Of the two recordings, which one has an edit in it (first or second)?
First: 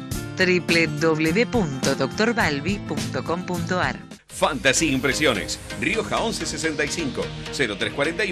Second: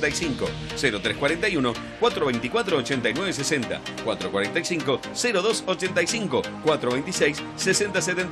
first